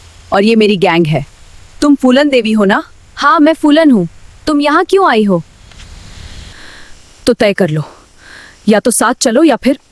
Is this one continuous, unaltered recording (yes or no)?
no